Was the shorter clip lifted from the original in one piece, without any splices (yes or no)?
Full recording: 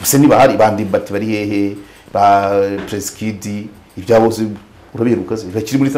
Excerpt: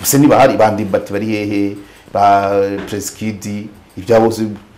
yes